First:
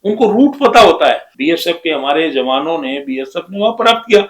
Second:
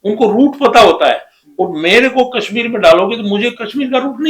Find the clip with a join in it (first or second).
first